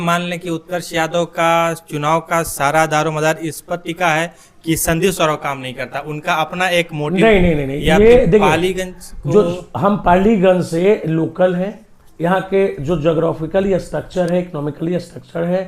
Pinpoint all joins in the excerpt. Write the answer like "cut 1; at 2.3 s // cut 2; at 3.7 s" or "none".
none